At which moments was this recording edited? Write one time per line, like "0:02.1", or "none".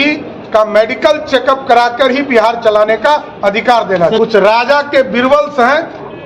0:04.2